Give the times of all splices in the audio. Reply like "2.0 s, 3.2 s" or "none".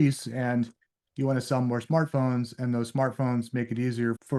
none